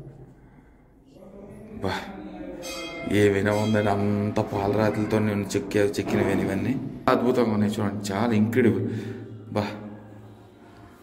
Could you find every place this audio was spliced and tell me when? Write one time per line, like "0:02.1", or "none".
0:07.1